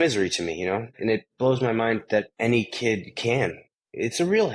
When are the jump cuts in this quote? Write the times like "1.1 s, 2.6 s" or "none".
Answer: 1.0 s, 2.3 s, 3.7 s